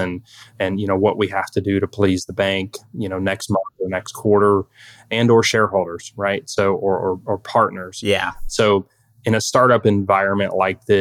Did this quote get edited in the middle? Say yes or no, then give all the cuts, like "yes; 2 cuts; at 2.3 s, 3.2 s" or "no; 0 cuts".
yes; 1 cut; at 8.4 s